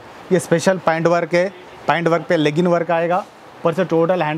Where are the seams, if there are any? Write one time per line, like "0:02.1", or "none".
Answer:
none

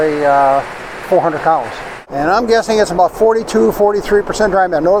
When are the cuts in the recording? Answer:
0:02.0

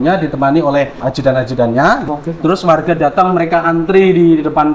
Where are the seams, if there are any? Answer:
0:01.0
0:02.1

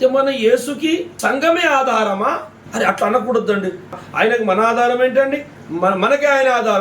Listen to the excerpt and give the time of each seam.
0:01.1
0:02.6
0:04.0

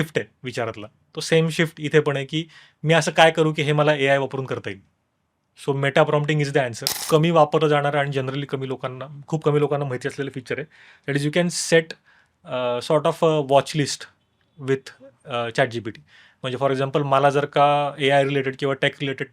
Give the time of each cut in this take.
0:06.9

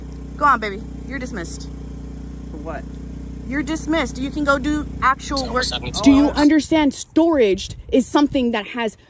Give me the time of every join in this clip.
0:05.9

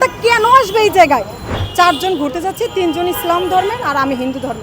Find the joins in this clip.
0:01.6

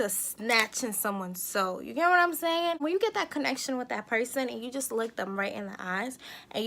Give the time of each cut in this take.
0:02.8

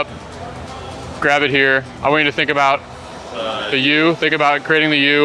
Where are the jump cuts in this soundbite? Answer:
none

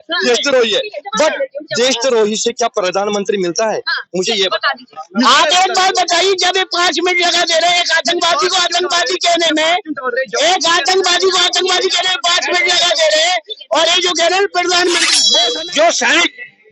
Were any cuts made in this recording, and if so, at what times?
0:15.4

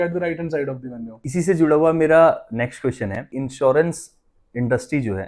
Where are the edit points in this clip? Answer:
0:01.1
0:03.4

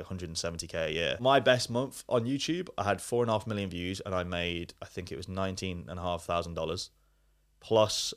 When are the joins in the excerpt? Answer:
0:01.2

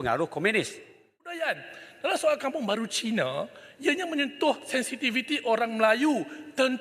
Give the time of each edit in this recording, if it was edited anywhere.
0:01.3

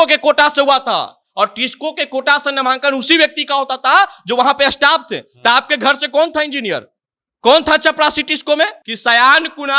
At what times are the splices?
0:08.9

